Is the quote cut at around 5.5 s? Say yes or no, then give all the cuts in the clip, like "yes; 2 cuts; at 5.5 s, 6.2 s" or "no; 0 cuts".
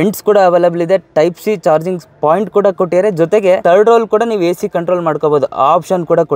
no; 1 cut; at 3.6 s